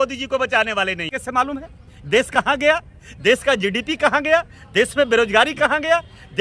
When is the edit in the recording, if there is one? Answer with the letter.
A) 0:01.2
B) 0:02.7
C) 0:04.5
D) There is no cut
A